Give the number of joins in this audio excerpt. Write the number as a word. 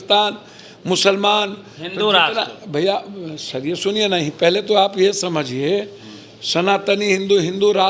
zero